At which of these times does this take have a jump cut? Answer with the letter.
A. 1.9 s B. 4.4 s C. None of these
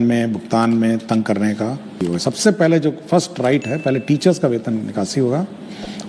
A